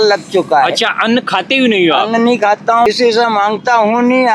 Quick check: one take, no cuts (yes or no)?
no